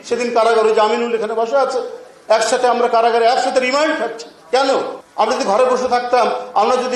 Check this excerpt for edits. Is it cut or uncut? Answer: cut